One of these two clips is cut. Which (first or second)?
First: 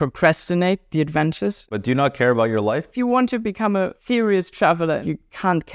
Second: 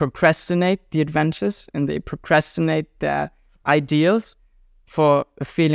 first